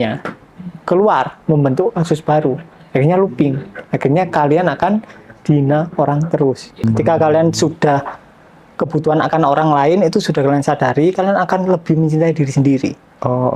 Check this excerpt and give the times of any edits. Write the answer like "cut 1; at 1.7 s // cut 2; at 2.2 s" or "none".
cut 1; at 6.8 s